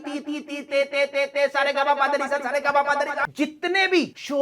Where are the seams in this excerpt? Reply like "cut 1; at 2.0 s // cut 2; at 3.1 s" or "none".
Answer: cut 1; at 3.3 s